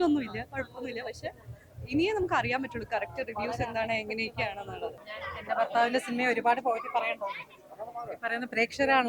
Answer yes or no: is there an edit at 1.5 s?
no